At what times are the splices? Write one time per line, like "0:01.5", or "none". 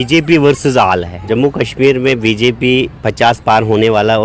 0:01.2